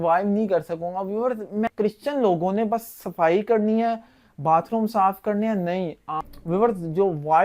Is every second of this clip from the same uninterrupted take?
no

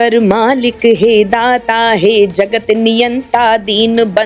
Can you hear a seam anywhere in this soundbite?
no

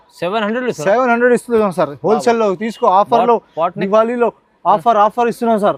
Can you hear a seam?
no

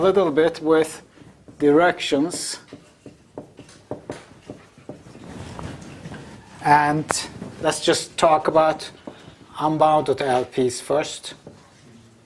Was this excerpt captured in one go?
yes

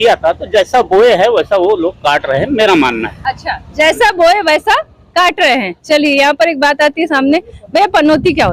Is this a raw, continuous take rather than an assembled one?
yes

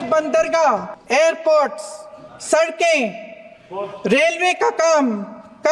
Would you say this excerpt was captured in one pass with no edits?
no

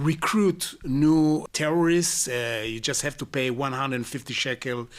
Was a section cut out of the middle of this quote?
yes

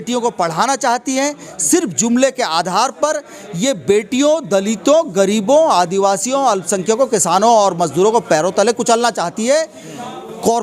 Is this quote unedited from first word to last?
yes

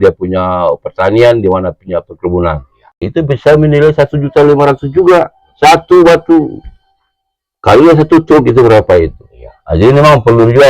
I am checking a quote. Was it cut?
yes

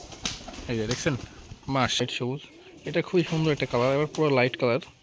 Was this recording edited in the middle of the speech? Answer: yes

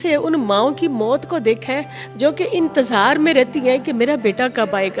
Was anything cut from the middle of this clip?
no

